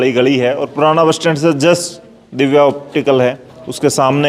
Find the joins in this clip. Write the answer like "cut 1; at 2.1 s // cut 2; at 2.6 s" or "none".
none